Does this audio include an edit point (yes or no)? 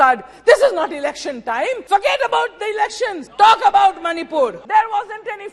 yes